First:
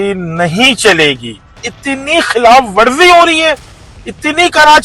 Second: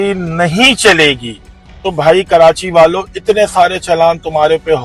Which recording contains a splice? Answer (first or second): first